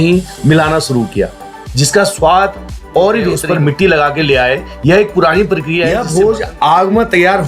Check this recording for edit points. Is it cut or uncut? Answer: cut